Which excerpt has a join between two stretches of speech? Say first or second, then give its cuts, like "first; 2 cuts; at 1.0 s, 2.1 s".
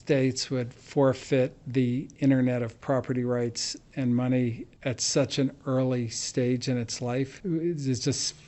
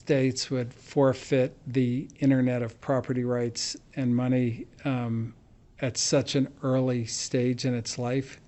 first; 2 cuts; at 4.7 s, 7.4 s